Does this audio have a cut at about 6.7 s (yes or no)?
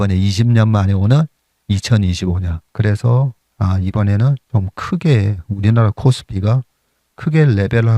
no